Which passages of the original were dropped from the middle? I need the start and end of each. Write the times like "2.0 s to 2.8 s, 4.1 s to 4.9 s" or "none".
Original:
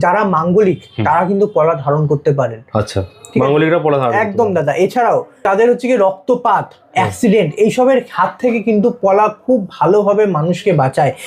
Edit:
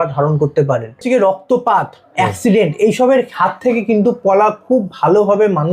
2.7 s to 5.8 s